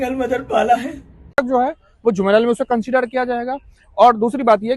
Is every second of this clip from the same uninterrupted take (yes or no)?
no